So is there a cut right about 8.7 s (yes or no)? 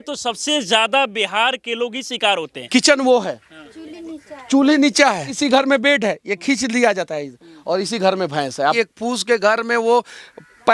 yes